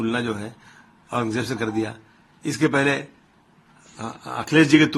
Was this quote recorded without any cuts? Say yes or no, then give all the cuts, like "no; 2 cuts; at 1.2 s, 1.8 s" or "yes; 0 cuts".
yes; 0 cuts